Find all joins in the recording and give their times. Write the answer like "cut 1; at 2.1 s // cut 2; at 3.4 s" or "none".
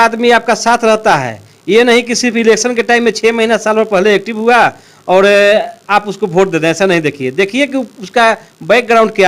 none